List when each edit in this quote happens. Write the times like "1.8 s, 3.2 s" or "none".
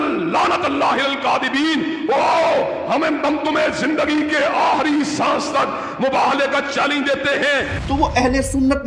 7.8 s